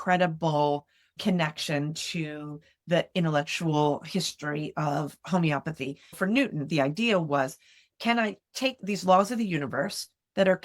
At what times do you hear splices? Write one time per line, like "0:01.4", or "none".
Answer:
0:06.2
0:08.8

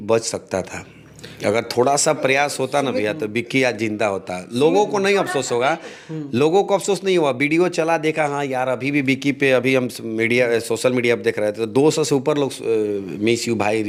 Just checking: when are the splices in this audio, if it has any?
none

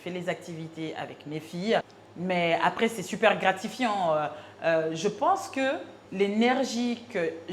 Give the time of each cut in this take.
0:02.0
0:06.0

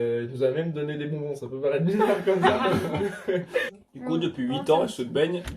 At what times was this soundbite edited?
0:03.7

